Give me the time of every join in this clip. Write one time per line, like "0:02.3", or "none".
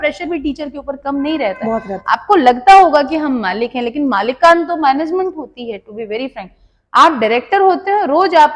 none

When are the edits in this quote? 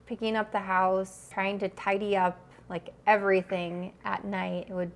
0:01.2

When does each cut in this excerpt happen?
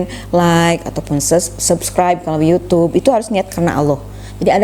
none

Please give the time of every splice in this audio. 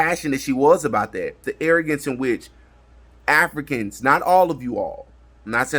0:01.5

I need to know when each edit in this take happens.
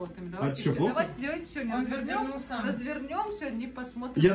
none

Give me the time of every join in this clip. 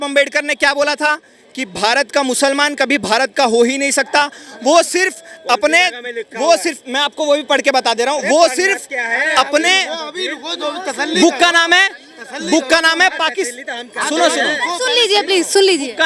none

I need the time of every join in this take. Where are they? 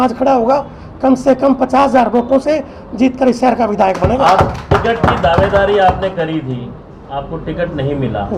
none

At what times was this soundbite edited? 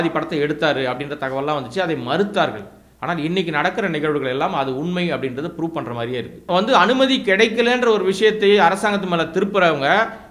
0:06.4

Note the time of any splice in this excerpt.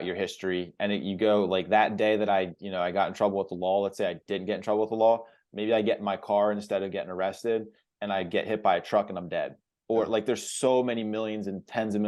none

